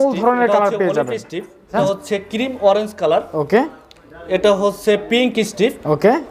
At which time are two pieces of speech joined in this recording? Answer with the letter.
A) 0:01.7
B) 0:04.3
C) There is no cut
A